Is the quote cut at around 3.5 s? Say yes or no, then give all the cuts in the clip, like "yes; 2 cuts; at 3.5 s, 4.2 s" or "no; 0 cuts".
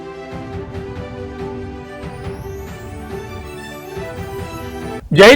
yes; 2 cuts; at 3.5 s, 4.4 s